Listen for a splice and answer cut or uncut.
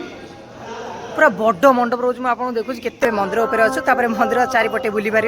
cut